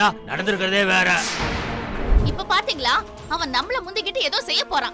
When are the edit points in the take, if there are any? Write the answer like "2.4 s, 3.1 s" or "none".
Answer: 2.2 s

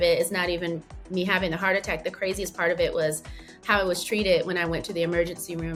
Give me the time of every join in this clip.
none

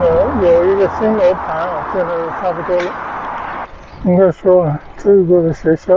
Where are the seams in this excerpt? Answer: 3.7 s

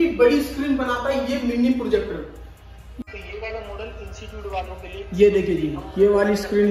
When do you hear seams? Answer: 2.9 s

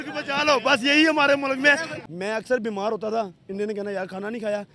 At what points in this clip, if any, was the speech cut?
1.9 s

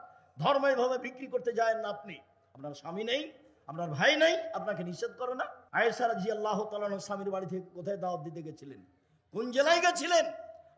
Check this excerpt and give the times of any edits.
5.6 s

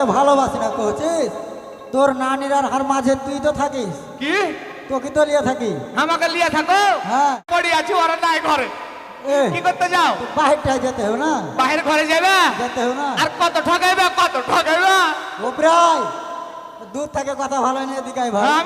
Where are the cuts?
7.4 s

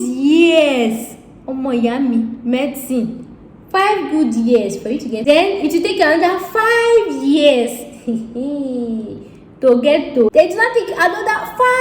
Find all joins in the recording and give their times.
5.2 s, 10.3 s

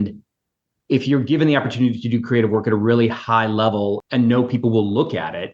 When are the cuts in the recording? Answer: 4.0 s

